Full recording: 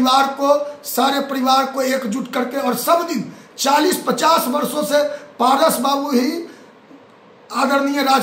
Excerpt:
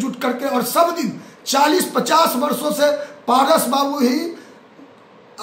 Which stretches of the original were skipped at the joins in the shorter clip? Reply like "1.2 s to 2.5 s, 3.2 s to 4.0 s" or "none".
none